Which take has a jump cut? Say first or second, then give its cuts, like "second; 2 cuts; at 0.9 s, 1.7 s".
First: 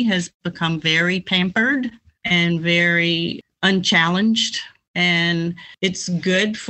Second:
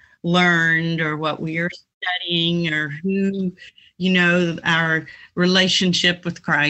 first; 4 cuts; at 2.1 s, 3.4 s, 4.8 s, 5.7 s